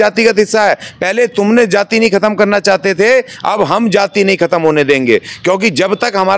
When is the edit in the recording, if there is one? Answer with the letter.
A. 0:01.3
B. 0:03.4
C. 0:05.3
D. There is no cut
D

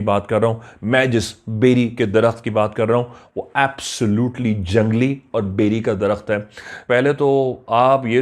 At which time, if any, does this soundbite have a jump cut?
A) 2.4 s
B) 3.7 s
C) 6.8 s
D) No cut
C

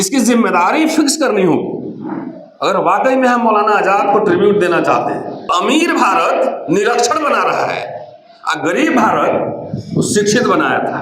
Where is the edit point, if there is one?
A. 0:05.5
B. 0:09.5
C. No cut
A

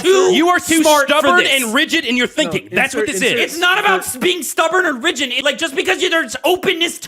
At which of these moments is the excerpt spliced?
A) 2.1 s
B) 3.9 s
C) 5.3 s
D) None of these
C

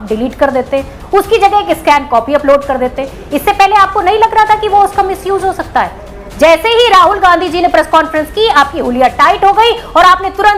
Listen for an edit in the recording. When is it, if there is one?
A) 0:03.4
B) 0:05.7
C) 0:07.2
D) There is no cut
D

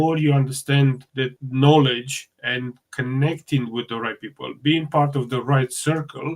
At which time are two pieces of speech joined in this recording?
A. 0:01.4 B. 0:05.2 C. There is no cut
A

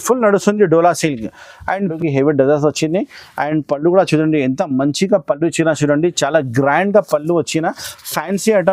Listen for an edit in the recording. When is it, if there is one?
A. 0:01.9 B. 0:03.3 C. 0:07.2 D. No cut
A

